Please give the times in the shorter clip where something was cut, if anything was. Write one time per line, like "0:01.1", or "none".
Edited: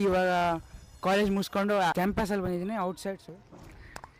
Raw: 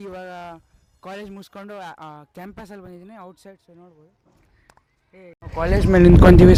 0:01.9
0:03.2